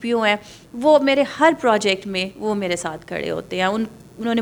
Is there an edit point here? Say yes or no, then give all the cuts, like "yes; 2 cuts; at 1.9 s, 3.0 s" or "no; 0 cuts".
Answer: no; 0 cuts